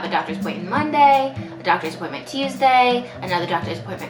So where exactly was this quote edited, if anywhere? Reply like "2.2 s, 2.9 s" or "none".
none

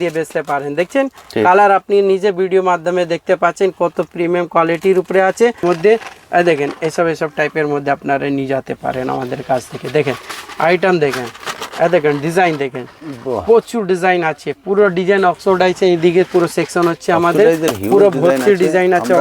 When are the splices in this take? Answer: 5.6 s

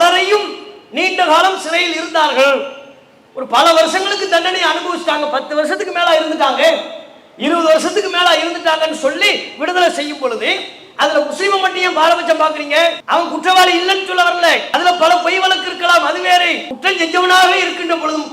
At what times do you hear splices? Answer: 13.0 s, 14.6 s, 16.7 s

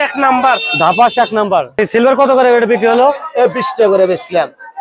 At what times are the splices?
1.8 s

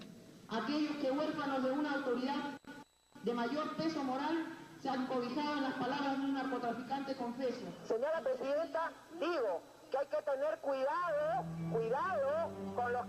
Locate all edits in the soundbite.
none

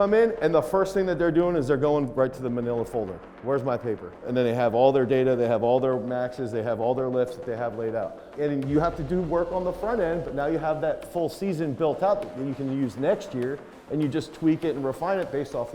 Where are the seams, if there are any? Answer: 4.3 s, 8.3 s

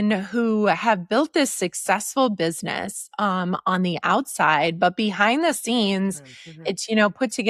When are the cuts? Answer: none

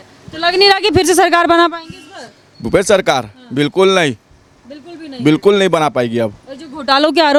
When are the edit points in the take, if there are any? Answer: none

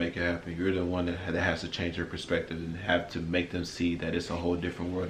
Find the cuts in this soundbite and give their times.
none

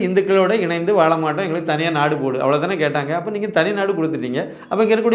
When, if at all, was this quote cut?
none

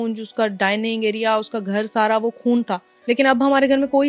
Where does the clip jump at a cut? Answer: 2.9 s

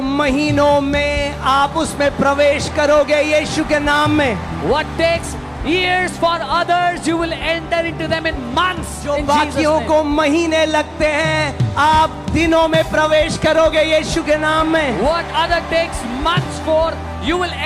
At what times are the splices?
none

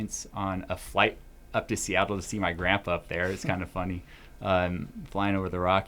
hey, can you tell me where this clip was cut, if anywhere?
none

